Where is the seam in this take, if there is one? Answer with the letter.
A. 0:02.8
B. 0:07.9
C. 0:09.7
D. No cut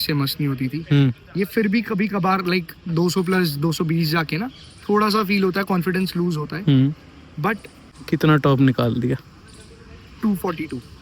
B